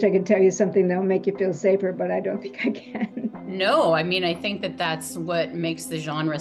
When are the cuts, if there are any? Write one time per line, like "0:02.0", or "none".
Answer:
0:03.4